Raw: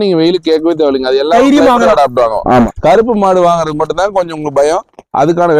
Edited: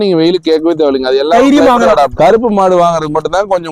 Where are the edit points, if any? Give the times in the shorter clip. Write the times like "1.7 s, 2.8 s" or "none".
2.1 s